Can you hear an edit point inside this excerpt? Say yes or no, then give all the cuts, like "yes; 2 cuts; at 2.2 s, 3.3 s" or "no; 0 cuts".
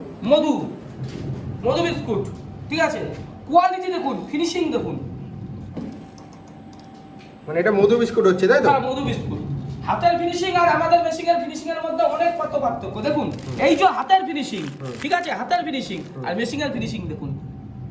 no; 0 cuts